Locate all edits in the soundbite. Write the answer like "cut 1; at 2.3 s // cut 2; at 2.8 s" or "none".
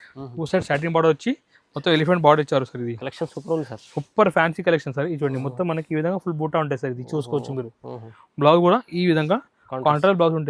none